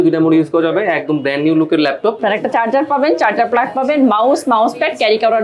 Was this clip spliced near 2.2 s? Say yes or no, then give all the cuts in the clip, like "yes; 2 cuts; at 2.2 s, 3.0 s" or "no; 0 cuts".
yes; 1 cut; at 2.2 s